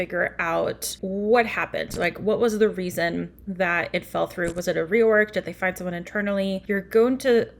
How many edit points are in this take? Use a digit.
2